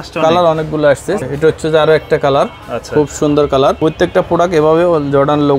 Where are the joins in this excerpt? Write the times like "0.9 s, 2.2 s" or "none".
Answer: 1.2 s, 3.8 s

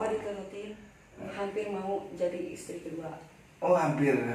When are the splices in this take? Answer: 1.3 s

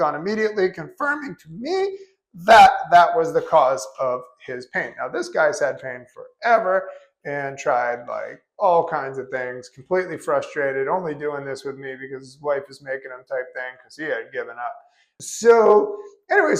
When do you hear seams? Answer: none

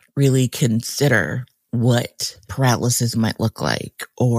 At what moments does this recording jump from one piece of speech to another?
none

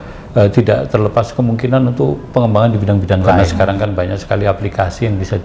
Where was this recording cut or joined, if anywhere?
3.4 s

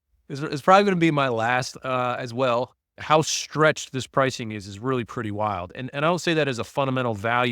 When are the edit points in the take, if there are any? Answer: 2.8 s

